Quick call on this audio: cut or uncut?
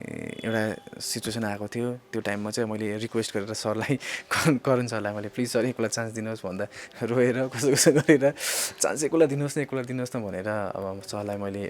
uncut